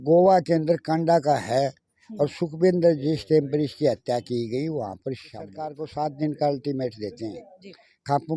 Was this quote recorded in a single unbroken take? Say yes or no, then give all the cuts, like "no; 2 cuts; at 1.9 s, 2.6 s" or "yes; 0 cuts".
no; 1 cut; at 5.8 s